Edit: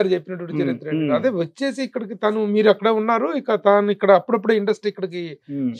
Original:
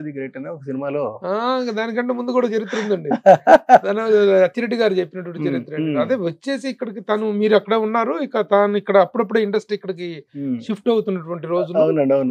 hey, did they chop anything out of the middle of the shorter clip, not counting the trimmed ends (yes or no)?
no